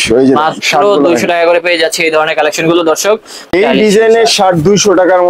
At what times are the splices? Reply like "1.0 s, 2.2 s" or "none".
3.5 s